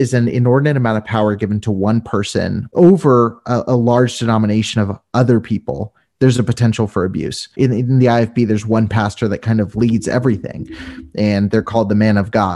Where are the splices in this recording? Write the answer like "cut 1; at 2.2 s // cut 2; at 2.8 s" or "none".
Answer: cut 1; at 2.7 s // cut 2; at 7.5 s